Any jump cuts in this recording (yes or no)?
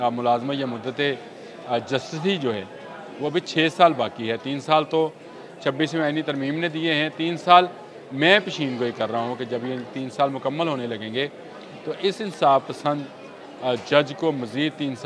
no